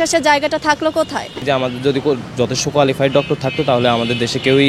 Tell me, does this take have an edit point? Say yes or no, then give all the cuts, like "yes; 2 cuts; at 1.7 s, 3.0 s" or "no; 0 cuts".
yes; 1 cut; at 1.4 s